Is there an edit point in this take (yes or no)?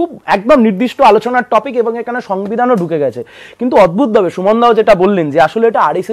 no